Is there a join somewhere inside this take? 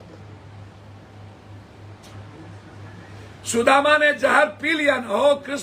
yes; 1 cut; at 3.9 s

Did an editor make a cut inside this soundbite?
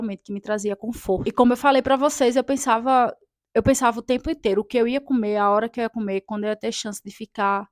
no; 0 cuts

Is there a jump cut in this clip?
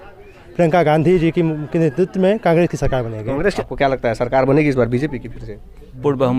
yes; 1 cut; at 3.5 s

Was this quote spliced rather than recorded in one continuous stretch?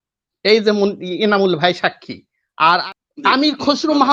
yes; 1 cut; at 2.8 s

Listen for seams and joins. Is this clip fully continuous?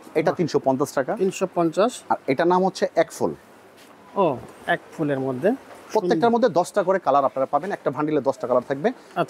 yes; 0 cuts

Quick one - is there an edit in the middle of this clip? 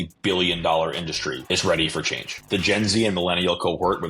yes; 2 cuts; at 1.4 s, 2.4 s

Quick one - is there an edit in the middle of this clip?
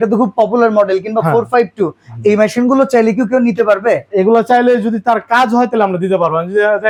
no; 0 cuts

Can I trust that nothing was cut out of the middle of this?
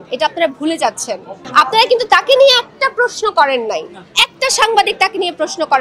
yes; 0 cuts

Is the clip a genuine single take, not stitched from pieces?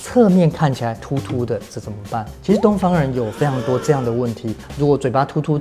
no; 2 cuts; at 1.0 s, 4.7 s

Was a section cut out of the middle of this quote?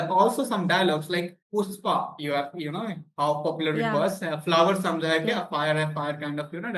no; 0 cuts

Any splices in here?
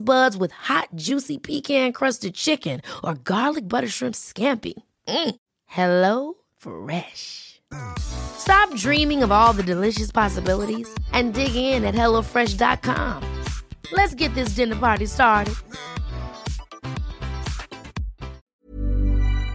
yes; 1 cut; at 18.5 s

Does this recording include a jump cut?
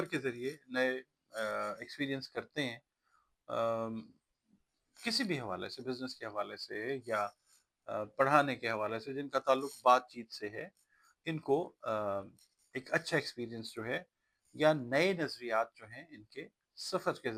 no; 0 cuts

